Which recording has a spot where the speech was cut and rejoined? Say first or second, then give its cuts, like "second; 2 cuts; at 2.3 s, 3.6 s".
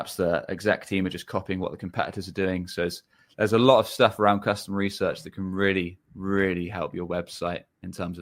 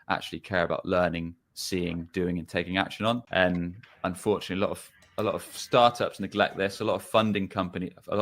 second; 1 cut; at 3.2 s